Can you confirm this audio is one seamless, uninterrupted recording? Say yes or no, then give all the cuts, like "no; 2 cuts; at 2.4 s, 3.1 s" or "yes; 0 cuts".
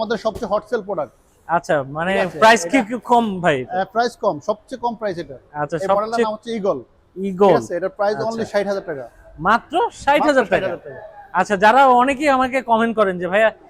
yes; 0 cuts